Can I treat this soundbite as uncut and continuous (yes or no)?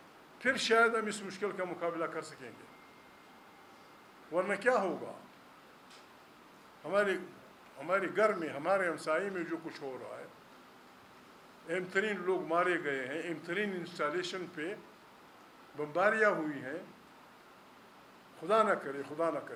yes